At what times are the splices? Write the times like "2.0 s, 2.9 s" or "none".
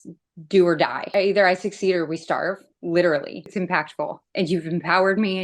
1.1 s, 3.6 s